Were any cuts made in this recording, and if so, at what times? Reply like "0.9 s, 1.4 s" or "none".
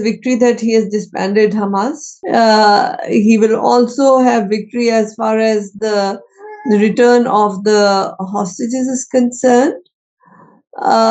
2.1 s